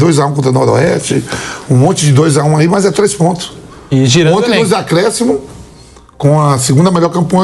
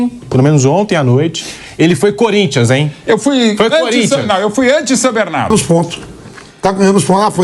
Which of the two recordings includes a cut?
second; 1 cut; at 5.5 s

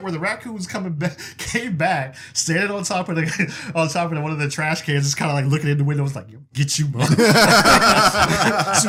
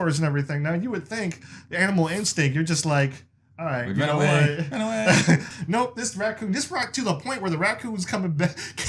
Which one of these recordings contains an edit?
second; 1 cut; at 5.5 s

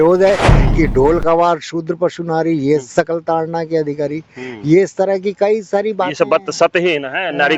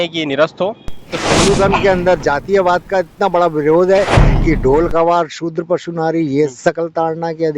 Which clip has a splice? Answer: second; 1 cut; at 1.1 s

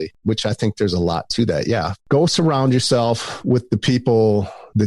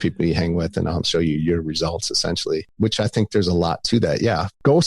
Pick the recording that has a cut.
second; 1 cut; at 1.1 s

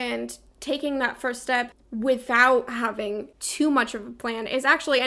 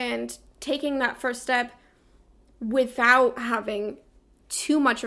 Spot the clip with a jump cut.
first; 2 cuts; at 1.8 s, 3.4 s

